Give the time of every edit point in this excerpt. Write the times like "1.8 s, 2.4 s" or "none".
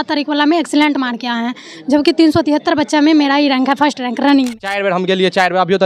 4.7 s